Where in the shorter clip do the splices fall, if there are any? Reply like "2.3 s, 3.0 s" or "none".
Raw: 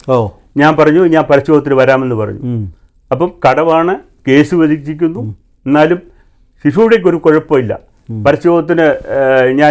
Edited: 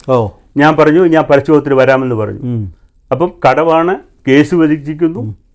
none